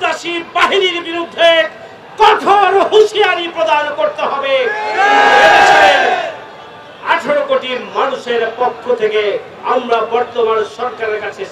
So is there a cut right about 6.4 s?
no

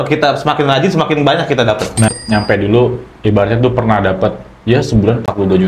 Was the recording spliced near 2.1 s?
yes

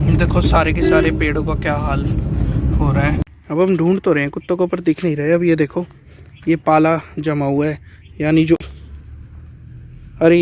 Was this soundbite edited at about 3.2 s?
yes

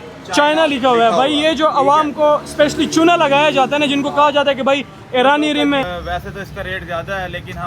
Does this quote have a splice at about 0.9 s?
no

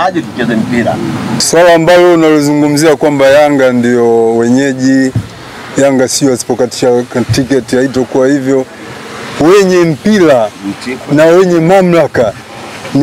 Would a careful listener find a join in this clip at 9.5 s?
no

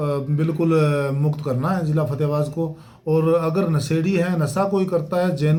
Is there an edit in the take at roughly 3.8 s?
no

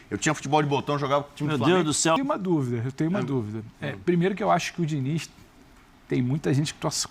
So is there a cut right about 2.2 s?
yes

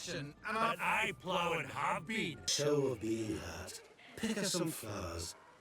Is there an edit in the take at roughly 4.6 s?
no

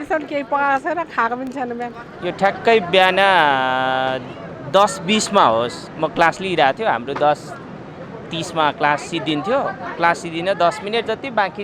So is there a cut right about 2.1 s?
no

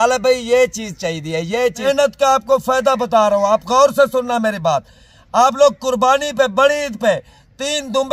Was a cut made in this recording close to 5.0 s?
no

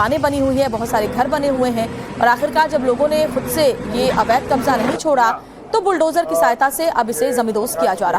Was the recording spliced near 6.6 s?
yes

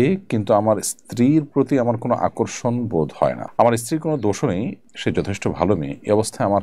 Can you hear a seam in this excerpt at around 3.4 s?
yes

